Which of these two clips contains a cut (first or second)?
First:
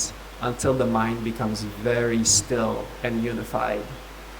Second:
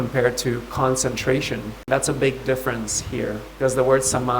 second